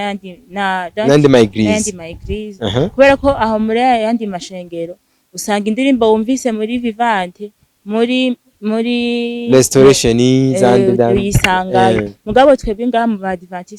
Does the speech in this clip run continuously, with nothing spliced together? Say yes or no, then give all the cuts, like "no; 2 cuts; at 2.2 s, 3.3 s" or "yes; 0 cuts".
yes; 0 cuts